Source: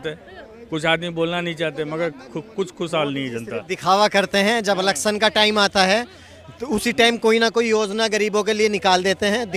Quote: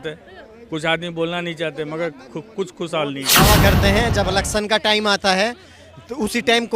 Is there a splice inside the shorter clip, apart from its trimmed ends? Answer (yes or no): yes